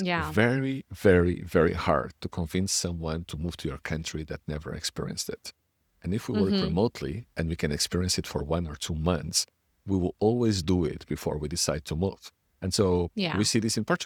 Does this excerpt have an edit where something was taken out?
no; 0 cuts

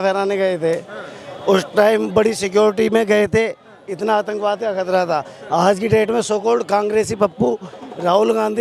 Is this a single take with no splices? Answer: yes; 0 cuts

